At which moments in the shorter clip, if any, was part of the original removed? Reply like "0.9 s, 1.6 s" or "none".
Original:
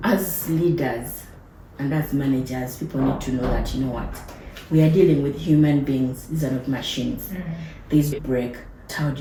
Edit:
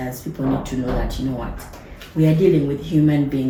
none